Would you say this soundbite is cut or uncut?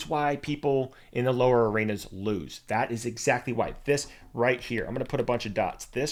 uncut